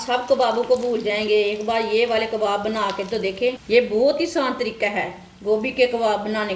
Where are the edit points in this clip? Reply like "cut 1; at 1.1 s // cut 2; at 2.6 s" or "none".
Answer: cut 1; at 3.6 s

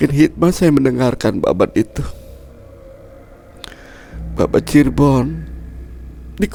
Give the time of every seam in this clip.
none

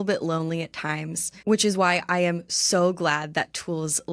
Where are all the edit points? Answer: cut 1; at 1.3 s

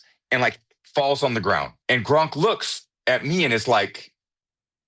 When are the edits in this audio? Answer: cut 1; at 1.7 s

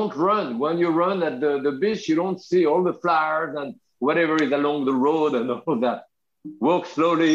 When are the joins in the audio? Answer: none

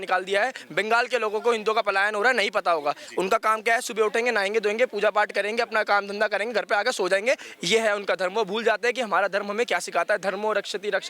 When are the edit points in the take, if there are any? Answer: none

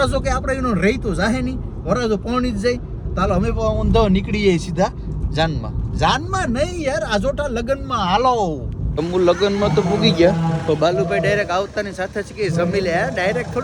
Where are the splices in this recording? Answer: none

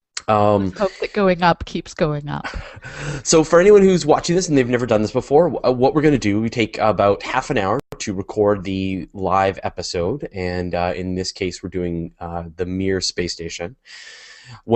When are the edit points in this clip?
cut 1; at 7.1 s

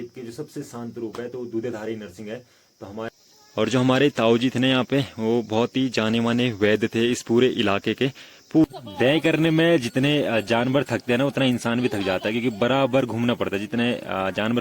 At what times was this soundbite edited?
cut 1; at 3.1 s // cut 2; at 8.6 s

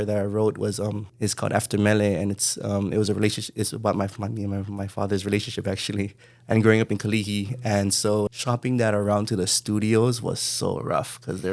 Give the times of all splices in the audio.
cut 1; at 1.1 s // cut 2; at 8.3 s

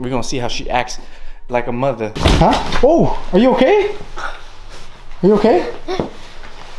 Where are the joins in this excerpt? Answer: cut 1; at 2.1 s

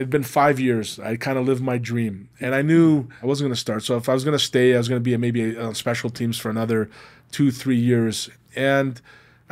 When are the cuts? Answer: cut 1; at 3.1 s

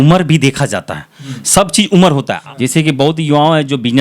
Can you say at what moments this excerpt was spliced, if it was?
cut 1; at 2.3 s

